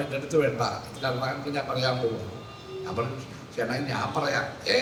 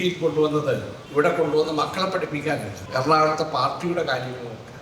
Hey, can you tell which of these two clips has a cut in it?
second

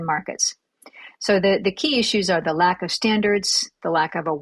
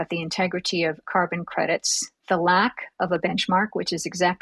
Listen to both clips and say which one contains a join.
second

